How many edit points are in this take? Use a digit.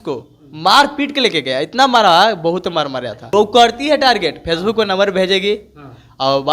1